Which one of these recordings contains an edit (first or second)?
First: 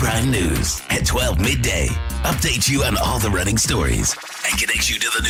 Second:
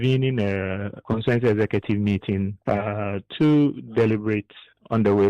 second